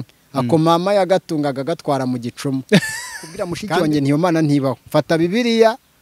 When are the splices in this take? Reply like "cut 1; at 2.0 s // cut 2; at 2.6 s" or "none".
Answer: cut 1; at 3.5 s